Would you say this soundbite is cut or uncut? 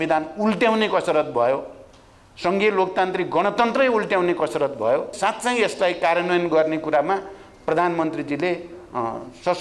cut